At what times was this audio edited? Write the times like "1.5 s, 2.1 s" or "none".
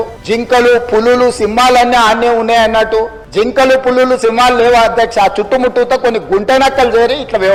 none